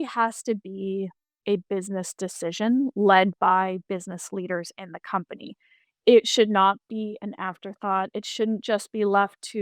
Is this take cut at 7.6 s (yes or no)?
no